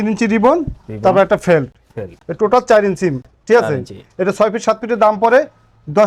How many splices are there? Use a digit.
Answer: 0